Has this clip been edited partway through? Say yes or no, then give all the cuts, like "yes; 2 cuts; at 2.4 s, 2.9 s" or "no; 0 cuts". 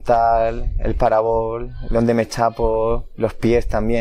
no; 0 cuts